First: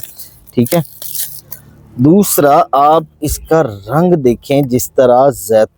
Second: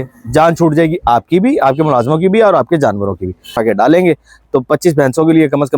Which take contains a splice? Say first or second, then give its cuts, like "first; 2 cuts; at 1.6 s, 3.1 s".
second; 1 cut; at 3.6 s